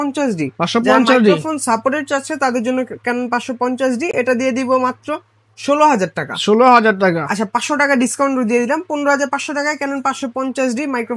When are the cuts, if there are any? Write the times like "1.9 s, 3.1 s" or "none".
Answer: none